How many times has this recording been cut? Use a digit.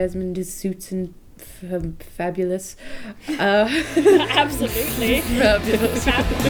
0